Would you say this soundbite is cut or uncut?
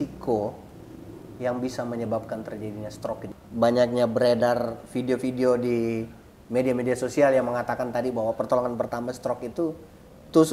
cut